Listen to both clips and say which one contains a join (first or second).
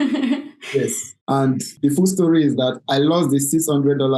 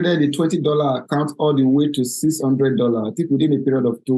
first